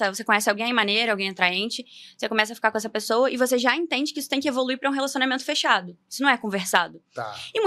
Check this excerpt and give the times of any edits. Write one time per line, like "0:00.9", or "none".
none